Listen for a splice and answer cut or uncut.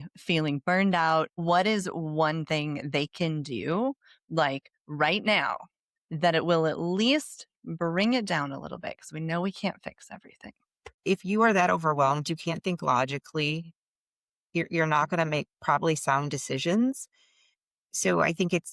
cut